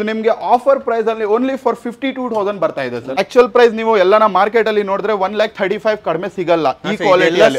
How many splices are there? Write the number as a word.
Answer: one